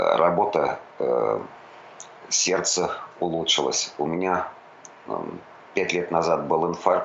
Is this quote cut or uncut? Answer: uncut